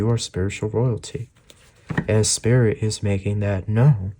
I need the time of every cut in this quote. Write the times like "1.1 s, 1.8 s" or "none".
none